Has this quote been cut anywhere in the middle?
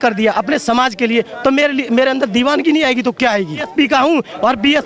yes; 1 cut; at 3.7 s

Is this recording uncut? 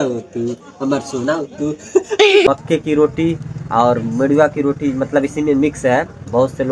no; 1 cut; at 2.5 s

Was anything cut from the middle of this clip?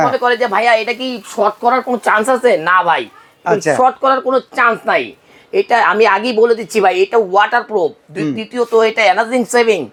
no; 0 cuts

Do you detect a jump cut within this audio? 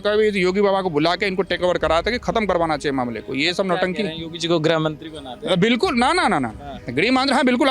no; 0 cuts

